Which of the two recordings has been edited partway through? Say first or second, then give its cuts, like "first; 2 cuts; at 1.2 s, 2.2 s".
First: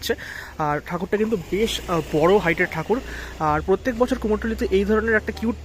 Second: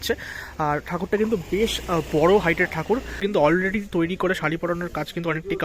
second; 1 cut; at 3.2 s